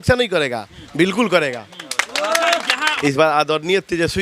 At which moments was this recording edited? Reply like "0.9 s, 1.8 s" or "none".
2.9 s